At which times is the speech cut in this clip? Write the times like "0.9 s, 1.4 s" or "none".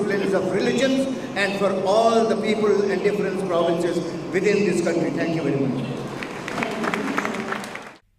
none